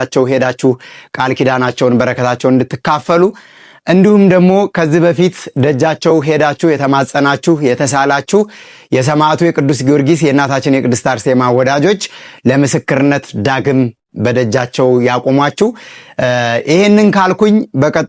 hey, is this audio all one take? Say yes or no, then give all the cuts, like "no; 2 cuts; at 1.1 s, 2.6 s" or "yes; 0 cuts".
yes; 0 cuts